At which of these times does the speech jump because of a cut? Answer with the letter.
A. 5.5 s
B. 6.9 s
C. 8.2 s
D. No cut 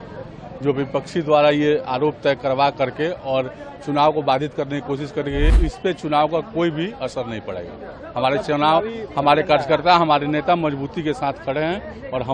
A